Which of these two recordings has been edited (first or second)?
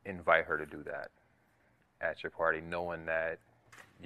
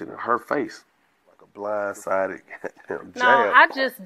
second